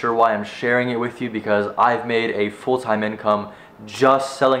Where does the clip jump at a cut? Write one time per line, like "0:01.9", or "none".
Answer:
none